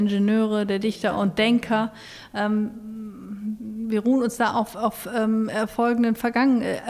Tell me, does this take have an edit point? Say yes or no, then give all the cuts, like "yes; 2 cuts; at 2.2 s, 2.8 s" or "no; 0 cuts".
no; 0 cuts